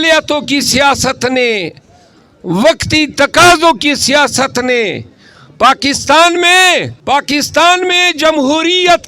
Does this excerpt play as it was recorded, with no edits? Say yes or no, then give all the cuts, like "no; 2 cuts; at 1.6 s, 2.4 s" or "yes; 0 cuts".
no; 1 cut; at 6.9 s